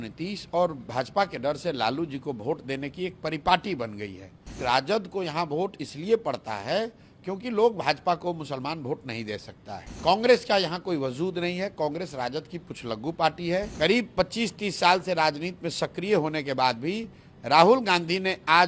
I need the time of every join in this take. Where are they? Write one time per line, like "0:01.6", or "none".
0:04.6
0:09.9
0:13.7